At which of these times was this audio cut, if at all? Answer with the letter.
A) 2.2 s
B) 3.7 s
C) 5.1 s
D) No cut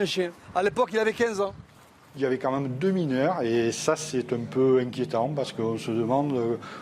A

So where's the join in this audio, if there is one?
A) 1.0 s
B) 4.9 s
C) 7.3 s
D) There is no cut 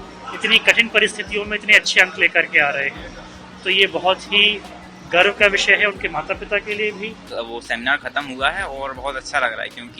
C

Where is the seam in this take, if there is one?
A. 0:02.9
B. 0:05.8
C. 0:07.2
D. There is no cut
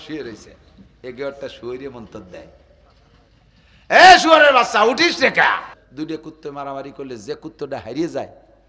B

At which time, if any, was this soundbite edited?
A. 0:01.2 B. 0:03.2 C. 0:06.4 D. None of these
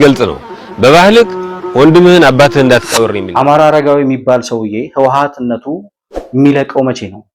B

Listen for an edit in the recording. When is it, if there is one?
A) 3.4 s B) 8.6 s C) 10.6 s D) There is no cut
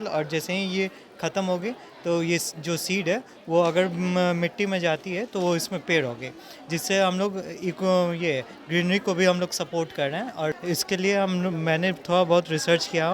C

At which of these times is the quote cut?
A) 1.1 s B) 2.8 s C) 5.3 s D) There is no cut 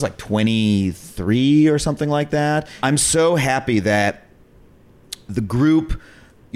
B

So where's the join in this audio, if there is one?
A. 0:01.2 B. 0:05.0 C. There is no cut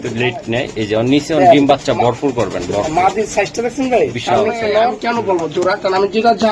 B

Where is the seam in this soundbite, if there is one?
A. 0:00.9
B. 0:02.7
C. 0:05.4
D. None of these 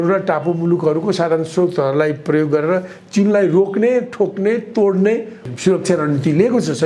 C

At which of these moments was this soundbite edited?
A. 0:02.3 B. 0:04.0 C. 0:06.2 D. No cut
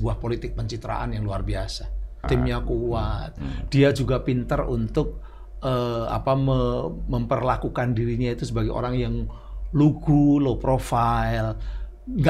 A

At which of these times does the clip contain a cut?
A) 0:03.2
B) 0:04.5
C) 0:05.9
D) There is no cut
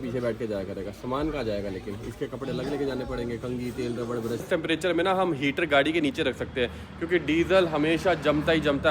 B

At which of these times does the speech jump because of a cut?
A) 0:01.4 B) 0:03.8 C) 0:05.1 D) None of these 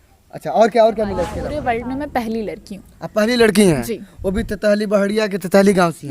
A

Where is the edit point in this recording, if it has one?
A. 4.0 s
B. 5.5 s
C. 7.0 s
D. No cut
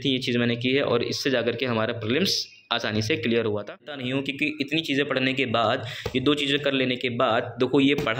A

